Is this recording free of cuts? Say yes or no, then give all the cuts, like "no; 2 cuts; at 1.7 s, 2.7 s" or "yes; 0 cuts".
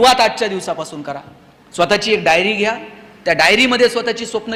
yes; 0 cuts